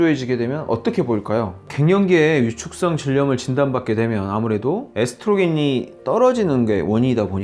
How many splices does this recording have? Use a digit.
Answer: 1